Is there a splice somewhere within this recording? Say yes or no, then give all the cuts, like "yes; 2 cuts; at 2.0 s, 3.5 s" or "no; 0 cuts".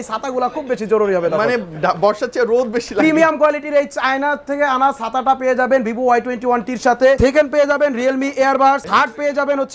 yes; 2 cuts; at 7.2 s, 8.8 s